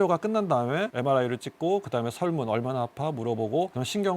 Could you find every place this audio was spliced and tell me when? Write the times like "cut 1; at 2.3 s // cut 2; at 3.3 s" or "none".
cut 1; at 0.9 s